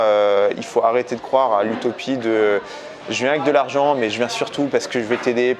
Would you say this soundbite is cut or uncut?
uncut